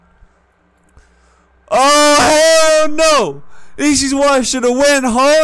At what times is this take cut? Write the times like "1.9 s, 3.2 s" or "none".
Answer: none